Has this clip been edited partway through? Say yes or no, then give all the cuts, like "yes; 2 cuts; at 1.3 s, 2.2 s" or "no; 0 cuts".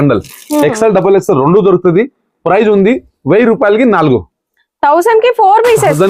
no; 0 cuts